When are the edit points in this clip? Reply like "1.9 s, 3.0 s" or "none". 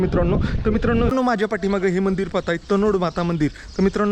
1.1 s